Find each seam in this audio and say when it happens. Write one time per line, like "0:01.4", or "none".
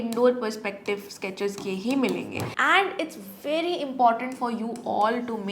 0:02.4